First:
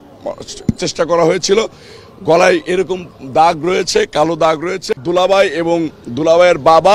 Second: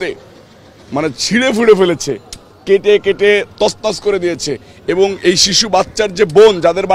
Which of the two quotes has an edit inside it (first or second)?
first